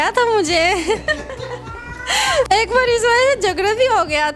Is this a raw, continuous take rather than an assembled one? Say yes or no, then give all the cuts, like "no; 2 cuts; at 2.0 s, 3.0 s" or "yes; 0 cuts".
yes; 0 cuts